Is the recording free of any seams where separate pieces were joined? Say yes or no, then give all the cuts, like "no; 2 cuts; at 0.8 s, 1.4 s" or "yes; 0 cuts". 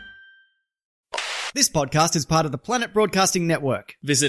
no; 1 cut; at 0.9 s